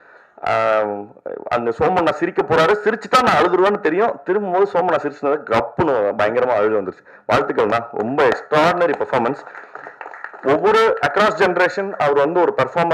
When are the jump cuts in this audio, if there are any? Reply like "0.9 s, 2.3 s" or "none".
none